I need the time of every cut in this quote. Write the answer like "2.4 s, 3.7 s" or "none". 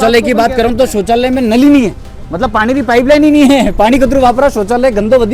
none